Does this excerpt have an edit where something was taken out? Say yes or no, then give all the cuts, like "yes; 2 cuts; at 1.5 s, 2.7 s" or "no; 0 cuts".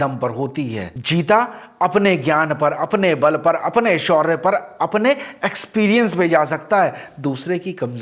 no; 0 cuts